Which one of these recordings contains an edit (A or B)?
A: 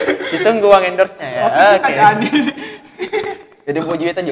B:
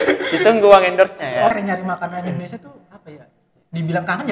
B